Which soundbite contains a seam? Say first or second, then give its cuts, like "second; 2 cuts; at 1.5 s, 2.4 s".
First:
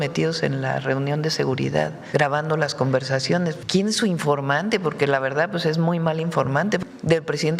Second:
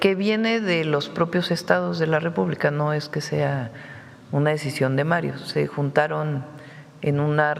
first; 3 cuts; at 2.0 s, 3.6 s, 6.8 s